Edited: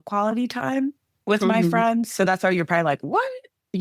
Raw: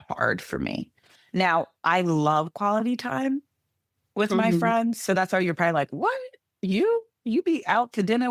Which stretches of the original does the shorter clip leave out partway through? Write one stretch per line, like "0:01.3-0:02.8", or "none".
0:03.6-0:04.0